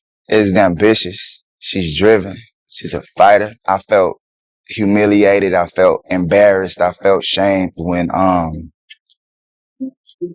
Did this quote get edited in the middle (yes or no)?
no